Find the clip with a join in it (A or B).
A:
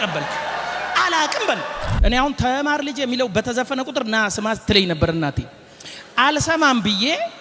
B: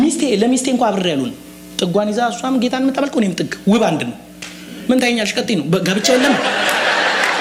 A